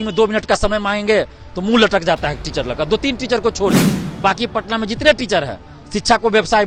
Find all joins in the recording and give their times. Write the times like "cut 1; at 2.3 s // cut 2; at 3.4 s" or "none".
none